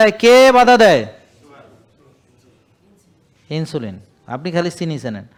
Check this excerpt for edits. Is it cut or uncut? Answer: uncut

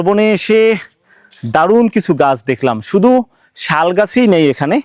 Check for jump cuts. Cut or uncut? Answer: uncut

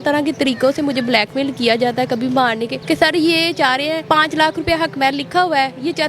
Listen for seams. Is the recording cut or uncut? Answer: cut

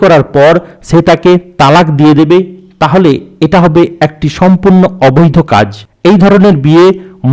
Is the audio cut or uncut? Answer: cut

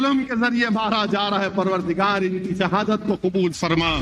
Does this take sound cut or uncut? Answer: cut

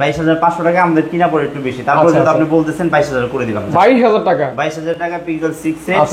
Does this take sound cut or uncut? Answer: uncut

